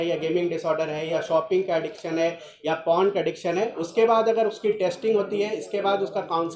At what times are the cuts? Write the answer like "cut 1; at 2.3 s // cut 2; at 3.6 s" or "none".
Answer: none